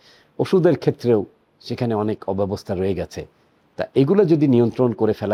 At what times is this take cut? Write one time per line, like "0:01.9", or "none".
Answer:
none